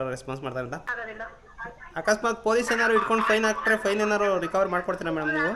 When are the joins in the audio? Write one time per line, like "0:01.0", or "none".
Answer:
0:00.9